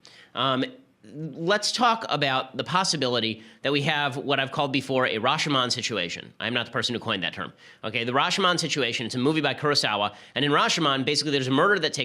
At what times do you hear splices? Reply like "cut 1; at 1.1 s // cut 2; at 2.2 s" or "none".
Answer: cut 1; at 9.1 s